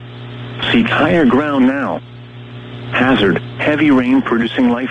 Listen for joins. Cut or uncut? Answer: uncut